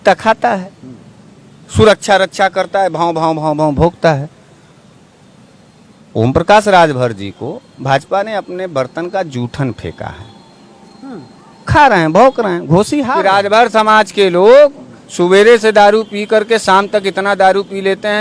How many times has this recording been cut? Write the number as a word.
one